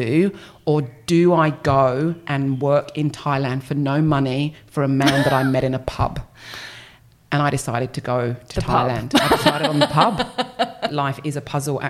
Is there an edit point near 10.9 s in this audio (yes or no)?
yes